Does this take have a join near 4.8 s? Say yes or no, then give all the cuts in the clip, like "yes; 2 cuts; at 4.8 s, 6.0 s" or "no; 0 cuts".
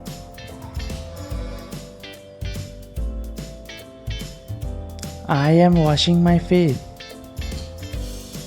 yes; 3 cuts; at 3.2 s, 4.8 s, 6.9 s